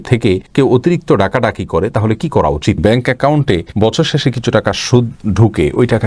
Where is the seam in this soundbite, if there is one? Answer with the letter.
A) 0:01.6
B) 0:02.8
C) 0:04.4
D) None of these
B